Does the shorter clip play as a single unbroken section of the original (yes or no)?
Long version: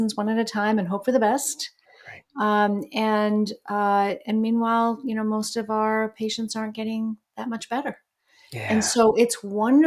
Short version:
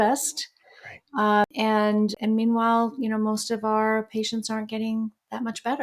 no